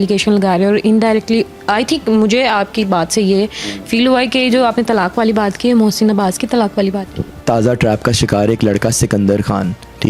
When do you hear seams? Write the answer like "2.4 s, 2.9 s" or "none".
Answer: 7.3 s